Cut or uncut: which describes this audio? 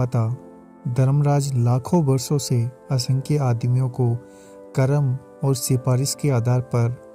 uncut